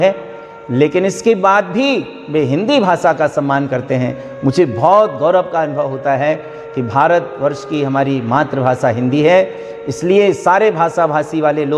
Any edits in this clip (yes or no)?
no